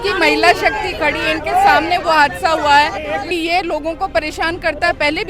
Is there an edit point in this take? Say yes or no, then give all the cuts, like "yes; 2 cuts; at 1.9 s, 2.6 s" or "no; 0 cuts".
yes; 1 cut; at 3.2 s